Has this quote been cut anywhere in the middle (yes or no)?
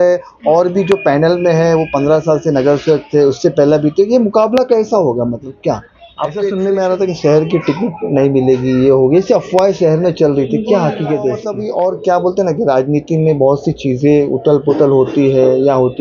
yes